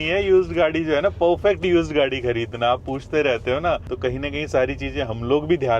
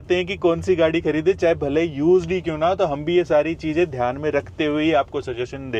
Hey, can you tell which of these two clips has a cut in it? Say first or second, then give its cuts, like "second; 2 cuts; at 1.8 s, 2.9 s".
first; 1 cut; at 3.9 s